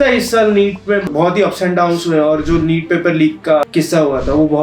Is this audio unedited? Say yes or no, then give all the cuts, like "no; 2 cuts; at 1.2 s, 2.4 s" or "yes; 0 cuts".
no; 2 cuts; at 1.1 s, 3.6 s